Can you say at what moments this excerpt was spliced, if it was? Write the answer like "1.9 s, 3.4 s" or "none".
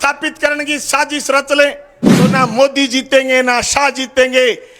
2.3 s